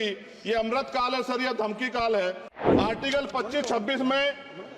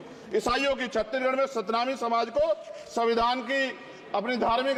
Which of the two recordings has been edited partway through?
first; 1 cut; at 2.5 s

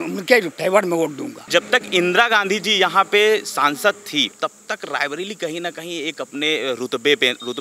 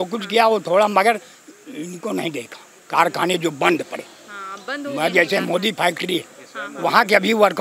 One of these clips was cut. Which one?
first; 2 cuts; at 1.3 s, 4.3 s

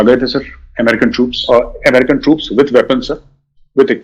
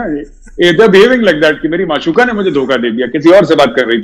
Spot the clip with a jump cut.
first; 1 cut; at 1.4 s

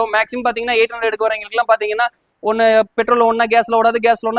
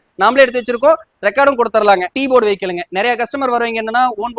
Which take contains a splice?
second; 1 cut; at 2.1 s

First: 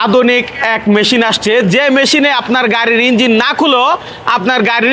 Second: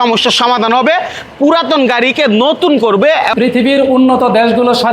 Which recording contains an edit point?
second; 1 cut; at 3.3 s

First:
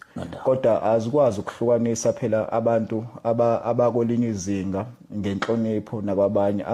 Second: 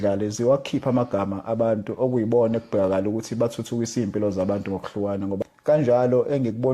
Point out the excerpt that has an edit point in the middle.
second; 1 cut; at 5.4 s

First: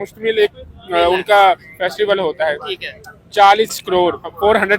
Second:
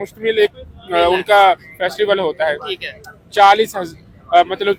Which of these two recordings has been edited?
first; 1 cut; at 3.8 s

